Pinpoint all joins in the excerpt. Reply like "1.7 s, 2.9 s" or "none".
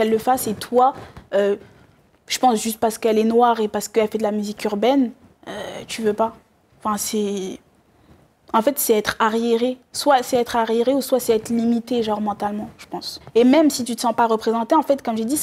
13.2 s